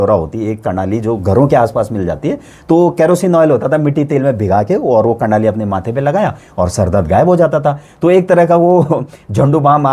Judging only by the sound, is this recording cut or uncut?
uncut